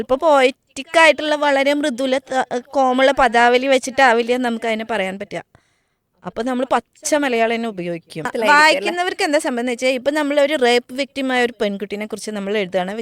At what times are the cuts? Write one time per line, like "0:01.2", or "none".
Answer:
0:08.3